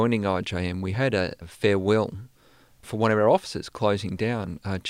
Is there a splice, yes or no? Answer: yes